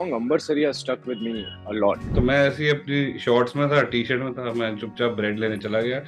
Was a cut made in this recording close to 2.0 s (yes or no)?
yes